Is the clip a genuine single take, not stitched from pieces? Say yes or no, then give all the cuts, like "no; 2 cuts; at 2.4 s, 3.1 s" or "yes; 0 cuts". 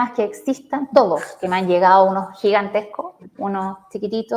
yes; 0 cuts